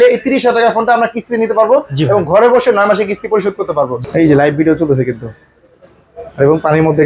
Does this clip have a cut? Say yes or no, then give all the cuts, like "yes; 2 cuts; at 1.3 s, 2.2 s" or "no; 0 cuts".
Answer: yes; 1 cut; at 4.0 s